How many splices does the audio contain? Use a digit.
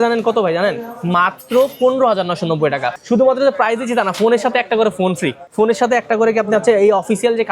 2